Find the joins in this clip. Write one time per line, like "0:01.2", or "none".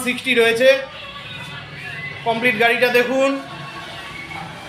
none

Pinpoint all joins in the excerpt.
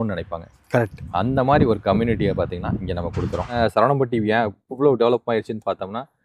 0:03.6

